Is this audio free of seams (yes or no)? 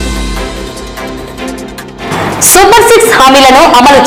yes